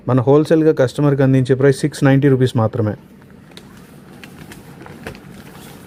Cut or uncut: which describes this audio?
uncut